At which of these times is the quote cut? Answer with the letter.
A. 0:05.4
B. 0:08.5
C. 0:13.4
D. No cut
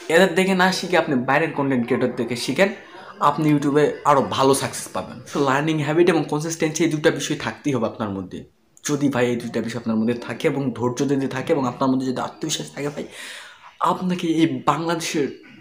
A